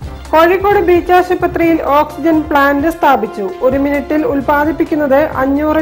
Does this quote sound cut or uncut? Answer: uncut